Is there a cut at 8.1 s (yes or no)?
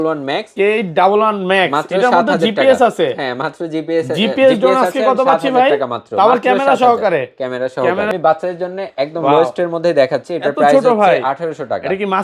yes